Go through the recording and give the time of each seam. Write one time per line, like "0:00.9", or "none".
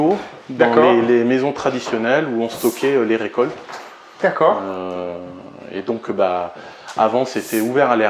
none

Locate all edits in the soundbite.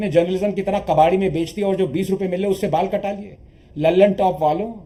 none

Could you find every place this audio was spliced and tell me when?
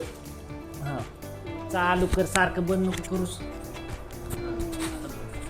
0:01.7

